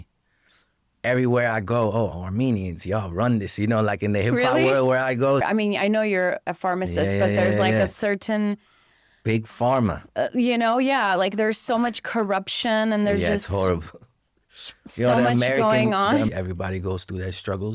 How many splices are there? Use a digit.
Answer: 2